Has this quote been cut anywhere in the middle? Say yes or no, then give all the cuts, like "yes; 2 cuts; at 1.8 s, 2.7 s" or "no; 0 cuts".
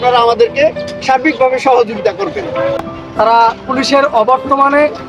yes; 1 cut; at 2.9 s